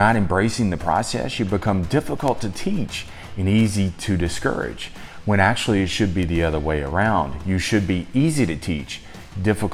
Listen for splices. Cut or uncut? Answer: uncut